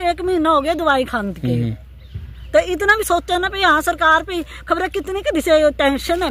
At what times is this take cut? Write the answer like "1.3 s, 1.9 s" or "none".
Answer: none